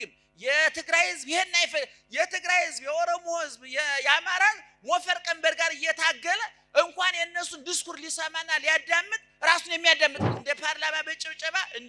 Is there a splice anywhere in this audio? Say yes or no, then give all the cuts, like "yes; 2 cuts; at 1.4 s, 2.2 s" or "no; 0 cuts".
yes; 1 cut; at 10.3 s